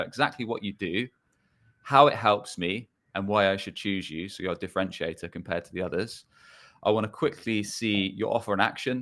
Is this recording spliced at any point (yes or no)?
no